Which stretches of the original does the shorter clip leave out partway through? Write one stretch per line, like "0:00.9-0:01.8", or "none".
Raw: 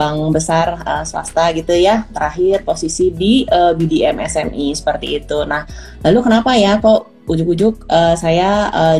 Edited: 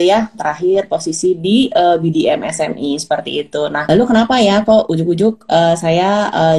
0:05.6-0:06.0
0:07.1-0:07.3